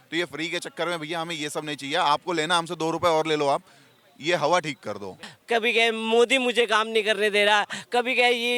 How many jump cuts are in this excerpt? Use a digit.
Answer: 1